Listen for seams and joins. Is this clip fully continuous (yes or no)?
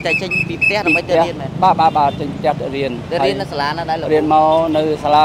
yes